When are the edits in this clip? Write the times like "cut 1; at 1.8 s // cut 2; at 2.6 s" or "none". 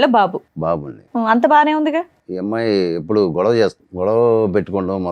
cut 1; at 2.2 s // cut 2; at 3.8 s